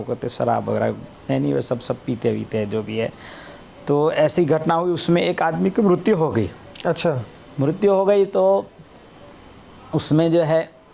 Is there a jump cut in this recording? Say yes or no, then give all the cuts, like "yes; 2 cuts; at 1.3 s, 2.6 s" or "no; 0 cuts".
no; 0 cuts